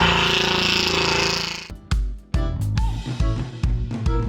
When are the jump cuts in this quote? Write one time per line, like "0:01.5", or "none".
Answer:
0:01.7

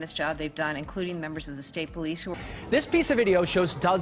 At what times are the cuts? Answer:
none

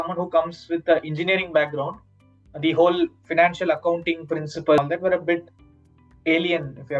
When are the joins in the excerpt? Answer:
0:04.8

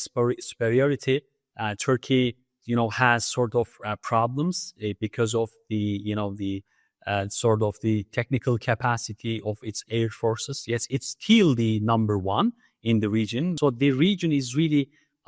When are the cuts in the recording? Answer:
0:13.5

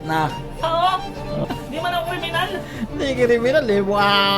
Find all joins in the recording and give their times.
0:01.4

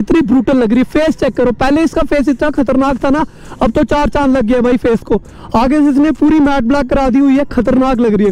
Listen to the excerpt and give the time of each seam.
none

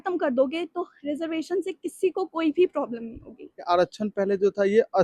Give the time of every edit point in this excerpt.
0:03.6

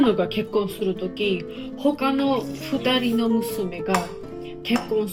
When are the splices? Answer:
none

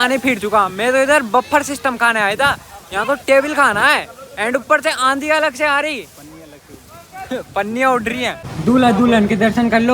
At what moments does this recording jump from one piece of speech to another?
0:08.5

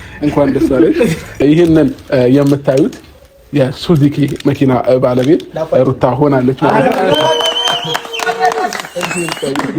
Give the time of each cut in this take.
0:01.4

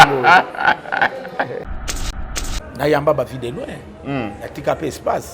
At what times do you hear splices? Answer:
0:02.1

